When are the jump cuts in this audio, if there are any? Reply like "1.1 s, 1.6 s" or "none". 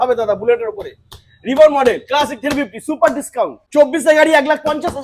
3.6 s